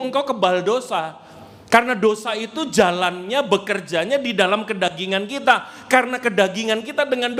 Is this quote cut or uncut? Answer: uncut